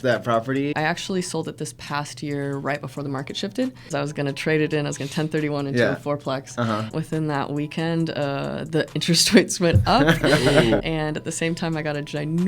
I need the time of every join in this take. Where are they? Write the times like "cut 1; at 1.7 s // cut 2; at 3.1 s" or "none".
cut 1; at 0.7 s // cut 2; at 3.9 s // cut 3; at 6.9 s // cut 4; at 10.8 s

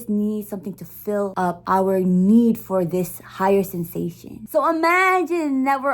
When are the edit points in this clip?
cut 1; at 1.5 s // cut 2; at 4.3 s

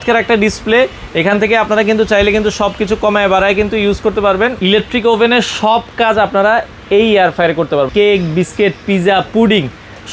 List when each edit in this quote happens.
cut 1; at 4.6 s // cut 2; at 7.9 s

